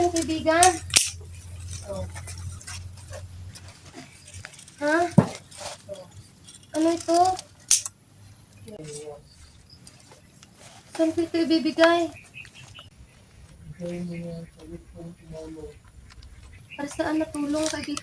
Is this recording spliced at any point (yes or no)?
no